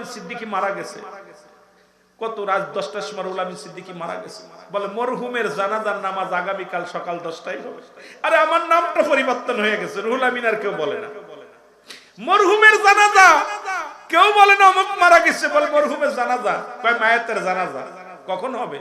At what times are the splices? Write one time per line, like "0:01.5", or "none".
none